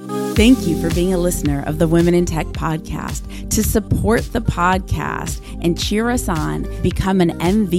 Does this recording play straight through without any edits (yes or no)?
yes